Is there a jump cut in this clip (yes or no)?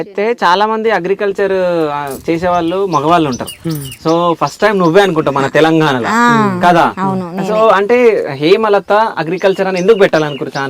no